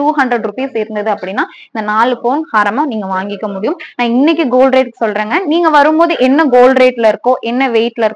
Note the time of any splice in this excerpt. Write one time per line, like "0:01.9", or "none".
none